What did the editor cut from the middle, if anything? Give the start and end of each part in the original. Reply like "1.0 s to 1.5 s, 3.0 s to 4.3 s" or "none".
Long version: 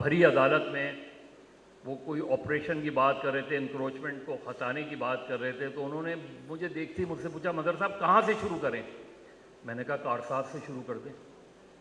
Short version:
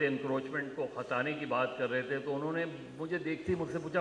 none